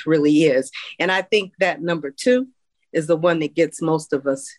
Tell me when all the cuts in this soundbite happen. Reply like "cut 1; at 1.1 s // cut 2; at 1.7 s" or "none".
none